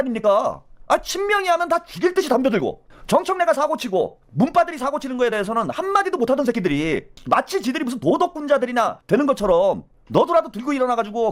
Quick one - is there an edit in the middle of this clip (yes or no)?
yes